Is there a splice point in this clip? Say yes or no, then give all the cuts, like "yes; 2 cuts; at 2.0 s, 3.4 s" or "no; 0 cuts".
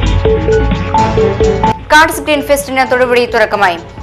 yes; 1 cut; at 1.6 s